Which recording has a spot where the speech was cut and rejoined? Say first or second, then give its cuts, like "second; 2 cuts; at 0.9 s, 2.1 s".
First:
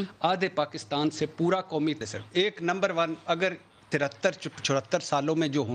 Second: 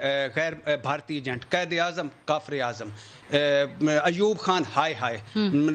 first; 1 cut; at 2.0 s